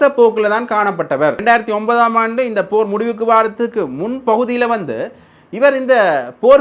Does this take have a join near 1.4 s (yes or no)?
yes